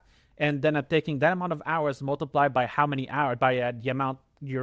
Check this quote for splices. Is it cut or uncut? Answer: uncut